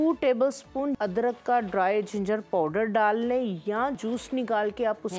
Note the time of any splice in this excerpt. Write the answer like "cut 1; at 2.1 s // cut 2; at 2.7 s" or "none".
cut 1; at 1.0 s // cut 2; at 4.0 s